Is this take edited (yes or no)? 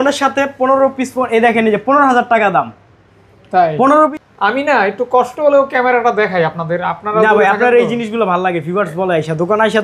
yes